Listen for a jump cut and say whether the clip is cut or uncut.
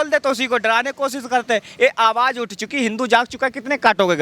uncut